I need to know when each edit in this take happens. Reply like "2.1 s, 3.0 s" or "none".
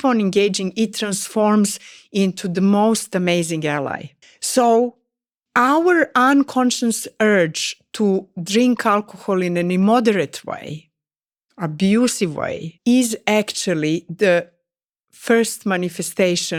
none